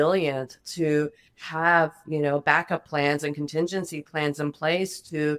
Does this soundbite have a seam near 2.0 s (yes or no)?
no